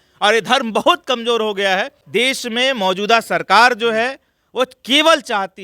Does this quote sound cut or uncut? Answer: cut